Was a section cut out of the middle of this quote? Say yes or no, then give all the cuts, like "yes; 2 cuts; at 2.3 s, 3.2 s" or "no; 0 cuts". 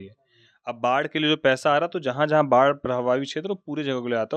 no; 0 cuts